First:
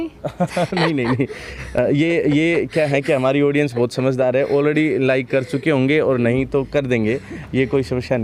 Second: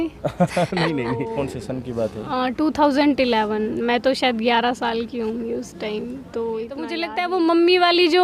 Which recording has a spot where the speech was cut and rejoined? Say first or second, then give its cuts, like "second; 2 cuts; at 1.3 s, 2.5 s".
second; 2 cuts; at 1.2 s, 7.1 s